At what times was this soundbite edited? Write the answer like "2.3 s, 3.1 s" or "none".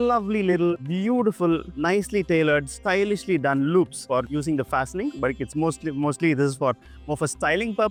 none